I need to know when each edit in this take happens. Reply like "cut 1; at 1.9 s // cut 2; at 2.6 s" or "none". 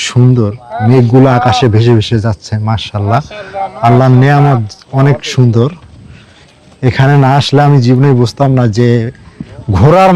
none

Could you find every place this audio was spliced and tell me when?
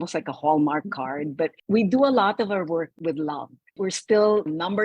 cut 1; at 2.9 s

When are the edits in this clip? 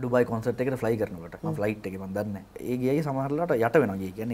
cut 1; at 1.3 s // cut 2; at 2.5 s

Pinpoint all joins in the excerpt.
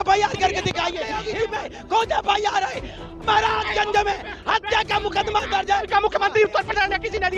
cut 1; at 1.1 s

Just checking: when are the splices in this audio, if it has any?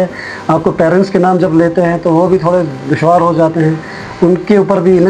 none

